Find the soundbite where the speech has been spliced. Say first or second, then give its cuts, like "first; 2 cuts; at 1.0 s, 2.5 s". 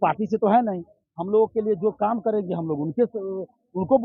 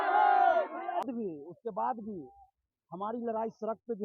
second; 1 cut; at 1.0 s